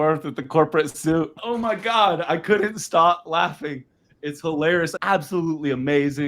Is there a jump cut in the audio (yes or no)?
yes